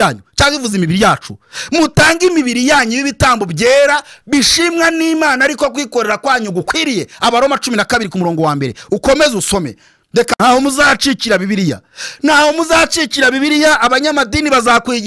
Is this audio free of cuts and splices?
no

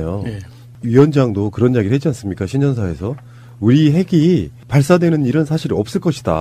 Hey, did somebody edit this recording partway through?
yes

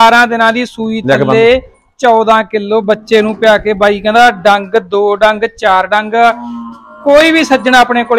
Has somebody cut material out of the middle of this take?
no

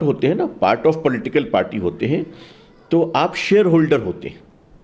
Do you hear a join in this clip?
no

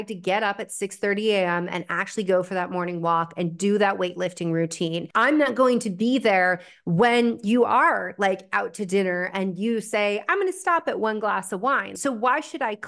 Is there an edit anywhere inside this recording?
yes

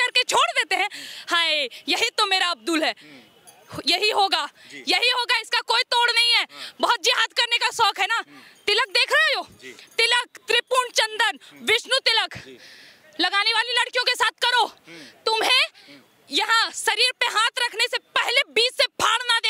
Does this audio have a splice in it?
no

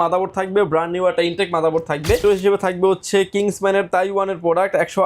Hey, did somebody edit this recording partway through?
yes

